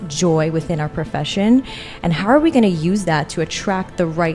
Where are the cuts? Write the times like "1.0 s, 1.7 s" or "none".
none